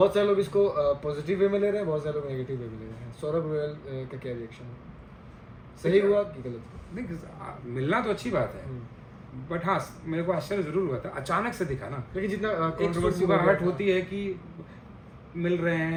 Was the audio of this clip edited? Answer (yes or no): no